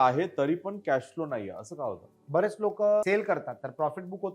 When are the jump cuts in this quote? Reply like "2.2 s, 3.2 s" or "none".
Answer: 2.1 s, 3.0 s